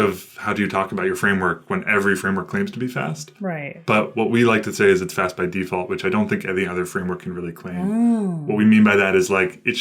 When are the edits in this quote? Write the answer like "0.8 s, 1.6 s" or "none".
none